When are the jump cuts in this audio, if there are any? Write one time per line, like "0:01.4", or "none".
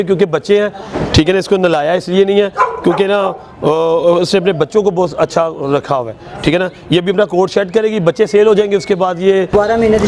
none